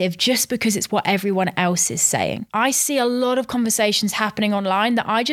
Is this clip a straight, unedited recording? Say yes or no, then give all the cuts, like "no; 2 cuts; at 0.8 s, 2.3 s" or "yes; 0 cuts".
yes; 0 cuts